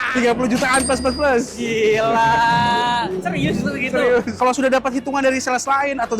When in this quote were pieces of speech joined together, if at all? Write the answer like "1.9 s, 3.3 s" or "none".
4.3 s